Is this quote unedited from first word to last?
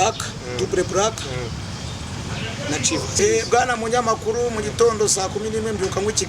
no; 1 cut; at 3.2 s

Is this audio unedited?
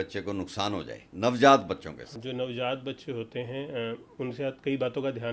no; 2 cuts; at 1.0 s, 2.1 s

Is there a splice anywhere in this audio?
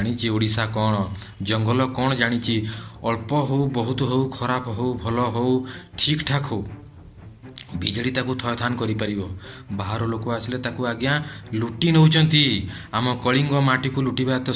no; 0 cuts

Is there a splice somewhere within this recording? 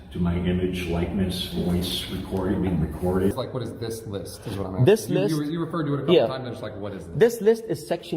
yes; 1 cut; at 3.3 s

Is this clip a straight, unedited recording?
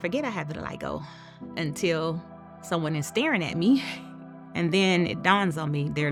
yes; 0 cuts

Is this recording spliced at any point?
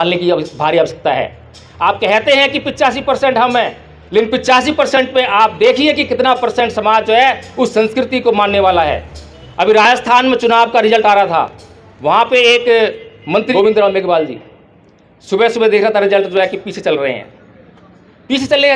yes; 1 cut; at 13.5 s

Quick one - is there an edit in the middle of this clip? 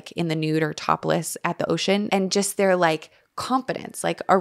yes; 1 cut; at 2.1 s

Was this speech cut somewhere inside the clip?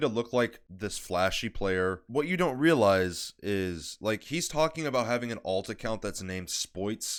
no; 0 cuts

